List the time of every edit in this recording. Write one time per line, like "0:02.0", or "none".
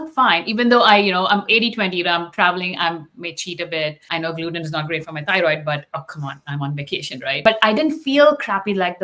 0:04.0
0:07.4

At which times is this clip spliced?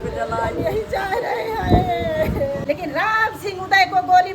0:02.6

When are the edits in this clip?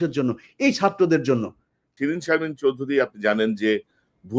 0:01.9

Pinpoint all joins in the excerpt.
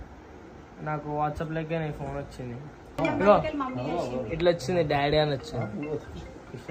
0:03.0

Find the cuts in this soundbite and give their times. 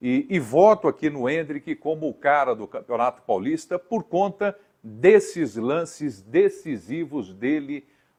none

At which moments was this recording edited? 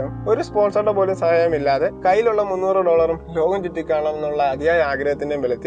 none

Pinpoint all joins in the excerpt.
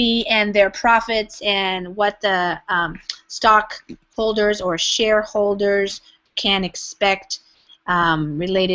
0:05.9

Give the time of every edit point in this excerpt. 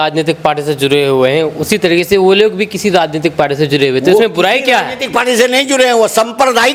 none

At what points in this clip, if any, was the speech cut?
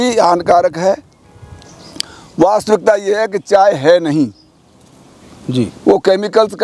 none

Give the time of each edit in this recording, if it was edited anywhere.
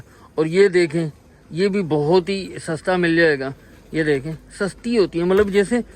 none

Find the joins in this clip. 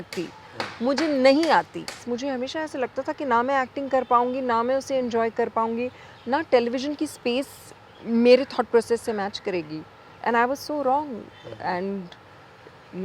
0:02.0

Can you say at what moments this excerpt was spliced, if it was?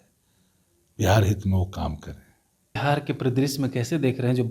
0:02.8

